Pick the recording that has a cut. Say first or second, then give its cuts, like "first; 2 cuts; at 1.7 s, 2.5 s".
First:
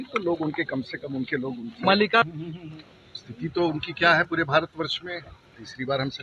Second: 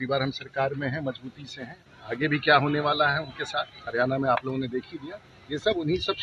first; 1 cut; at 2.3 s